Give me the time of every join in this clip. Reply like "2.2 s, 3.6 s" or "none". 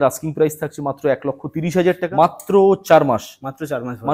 2.1 s